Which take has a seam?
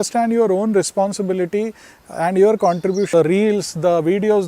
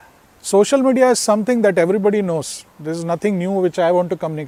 first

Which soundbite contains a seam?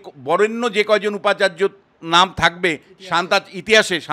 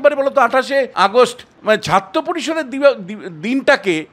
second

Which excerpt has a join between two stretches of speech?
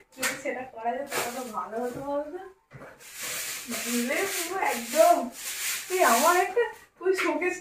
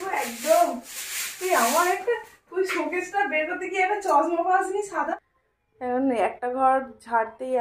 second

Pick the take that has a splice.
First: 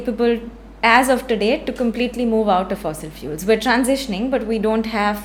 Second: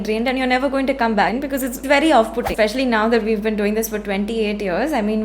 second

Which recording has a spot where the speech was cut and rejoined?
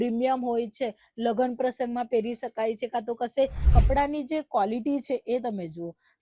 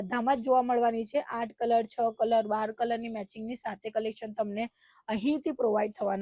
first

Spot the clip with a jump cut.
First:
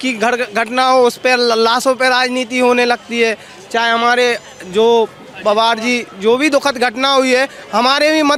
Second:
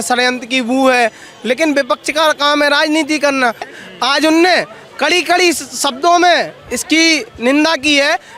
second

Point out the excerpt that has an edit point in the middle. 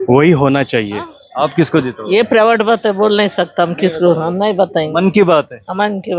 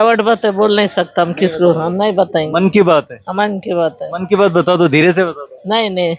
first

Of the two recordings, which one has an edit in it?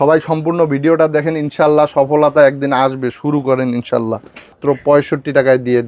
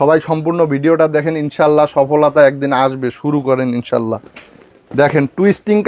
first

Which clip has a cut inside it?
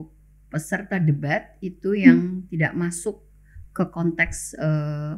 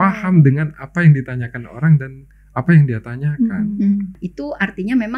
second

